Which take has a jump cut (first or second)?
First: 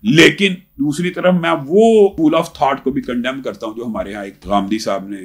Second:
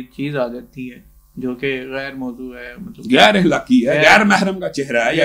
first